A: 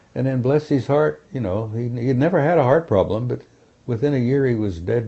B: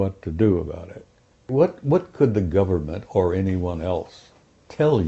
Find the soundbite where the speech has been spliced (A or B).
B